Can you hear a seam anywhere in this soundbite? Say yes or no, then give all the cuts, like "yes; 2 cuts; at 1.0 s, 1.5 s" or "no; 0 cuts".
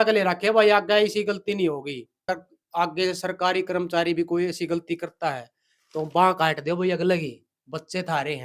yes; 1 cut; at 2.3 s